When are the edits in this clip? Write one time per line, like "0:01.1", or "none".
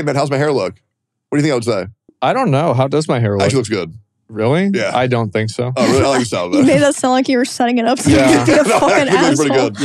0:02.0